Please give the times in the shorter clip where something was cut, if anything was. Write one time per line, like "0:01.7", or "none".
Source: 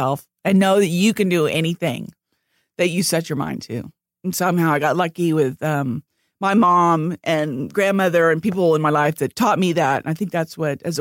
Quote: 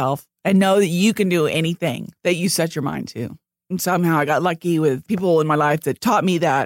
0:02.1
0:05.0

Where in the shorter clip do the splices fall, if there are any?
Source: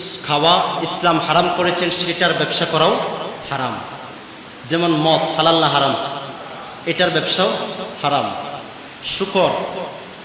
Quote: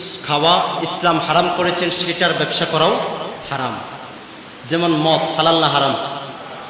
none

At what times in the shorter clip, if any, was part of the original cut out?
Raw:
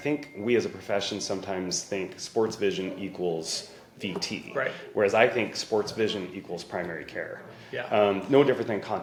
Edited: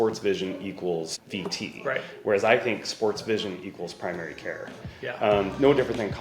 0:01.2

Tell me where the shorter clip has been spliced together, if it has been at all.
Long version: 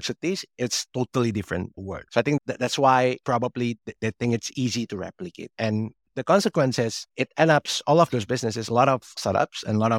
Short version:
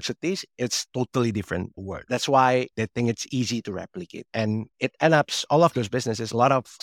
0:02.0
0:02.7
0:04.7

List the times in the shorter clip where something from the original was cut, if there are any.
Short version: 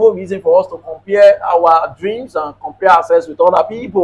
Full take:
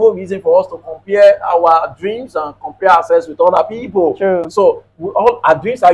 none

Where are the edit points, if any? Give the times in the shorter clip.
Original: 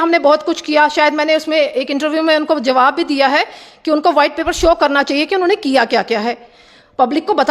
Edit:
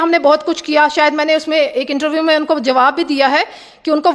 none

